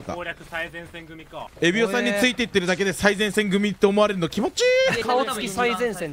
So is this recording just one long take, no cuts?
no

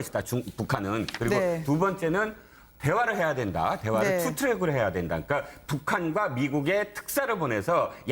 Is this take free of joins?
no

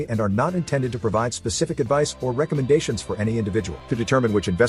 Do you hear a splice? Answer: no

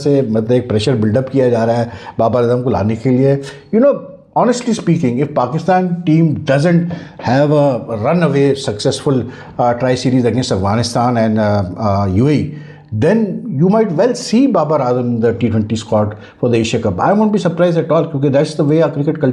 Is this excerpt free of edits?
yes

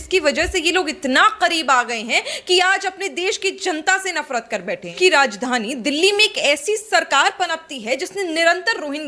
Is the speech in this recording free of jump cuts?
no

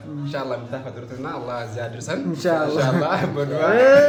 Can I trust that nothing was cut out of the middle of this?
yes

